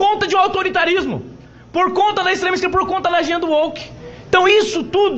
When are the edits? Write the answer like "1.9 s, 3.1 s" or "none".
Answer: none